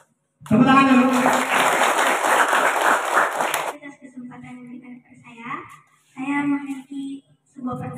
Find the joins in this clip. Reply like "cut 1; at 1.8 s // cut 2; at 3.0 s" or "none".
cut 1; at 3.7 s